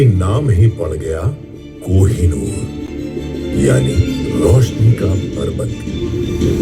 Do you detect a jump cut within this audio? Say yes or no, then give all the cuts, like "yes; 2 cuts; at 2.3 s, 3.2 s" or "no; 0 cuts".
no; 0 cuts